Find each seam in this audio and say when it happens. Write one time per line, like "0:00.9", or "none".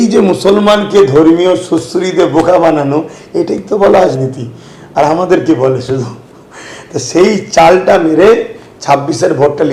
none

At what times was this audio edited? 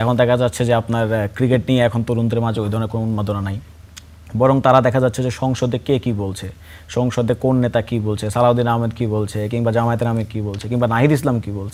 none

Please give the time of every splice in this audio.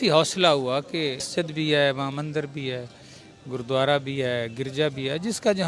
0:01.2

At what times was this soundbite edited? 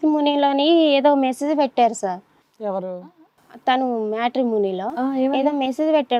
none

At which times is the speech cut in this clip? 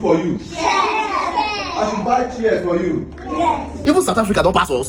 0:03.7

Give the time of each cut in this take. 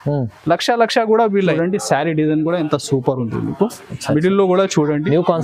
0:01.5

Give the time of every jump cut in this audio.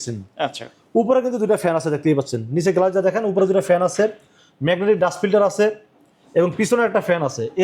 none

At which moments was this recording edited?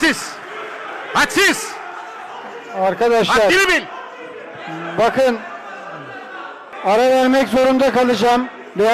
0:06.7

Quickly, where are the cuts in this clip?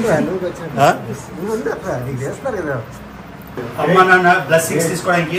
0:03.6

